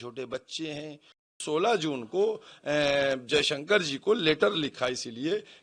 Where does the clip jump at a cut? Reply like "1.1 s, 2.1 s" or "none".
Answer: 1.4 s

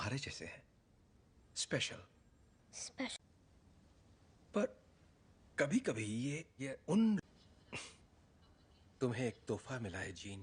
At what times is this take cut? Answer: none

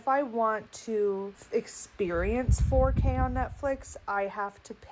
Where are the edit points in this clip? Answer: 1.4 s

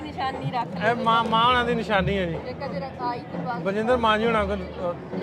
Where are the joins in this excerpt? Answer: none

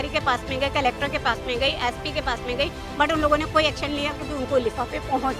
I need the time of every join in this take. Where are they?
2.8 s

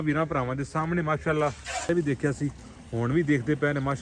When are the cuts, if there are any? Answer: 1.9 s

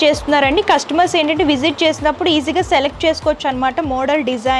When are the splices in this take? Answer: none

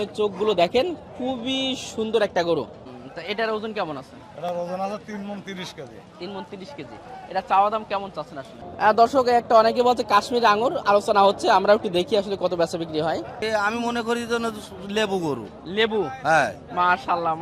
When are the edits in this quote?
2.8 s, 8.6 s, 13.4 s

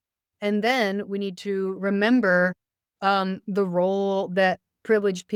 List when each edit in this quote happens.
none

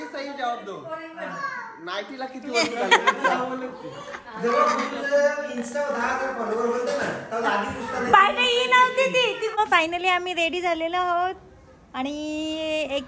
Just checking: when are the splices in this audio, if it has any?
9.5 s

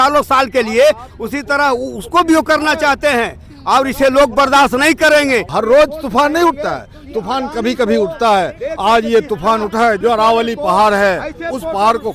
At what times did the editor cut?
5.5 s, 10.0 s

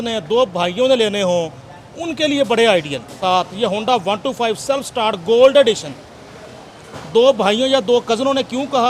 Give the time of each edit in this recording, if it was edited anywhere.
3.2 s

